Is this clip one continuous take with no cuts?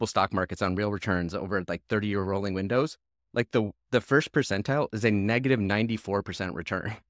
yes; 0 cuts

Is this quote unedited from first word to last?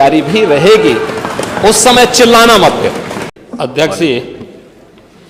yes; 0 cuts

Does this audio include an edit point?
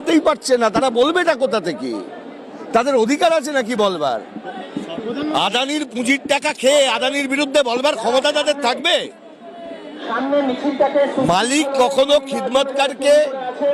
no; 0 cuts

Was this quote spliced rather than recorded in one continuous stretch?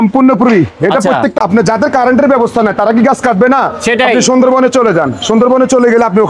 yes; 1 cut; at 1.4 s

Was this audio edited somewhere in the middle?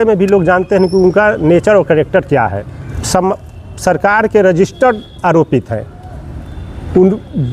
yes; 1 cut; at 3.0 s

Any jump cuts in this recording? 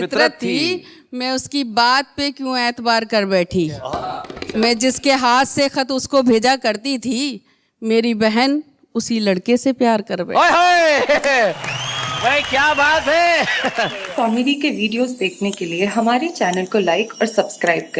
yes; 1 cut; at 14.0 s

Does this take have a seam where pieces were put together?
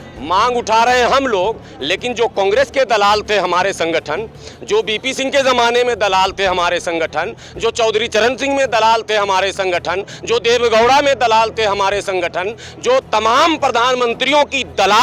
no; 0 cuts

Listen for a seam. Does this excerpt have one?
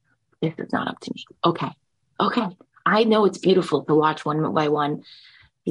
no; 0 cuts

